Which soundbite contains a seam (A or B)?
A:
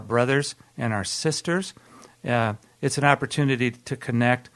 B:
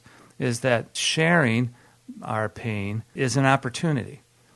B